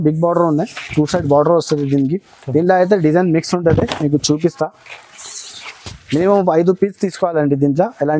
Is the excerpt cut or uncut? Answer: uncut